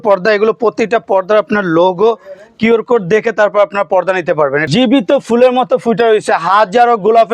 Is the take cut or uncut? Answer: cut